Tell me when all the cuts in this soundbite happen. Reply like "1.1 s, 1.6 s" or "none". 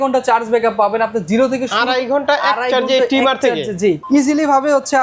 4.0 s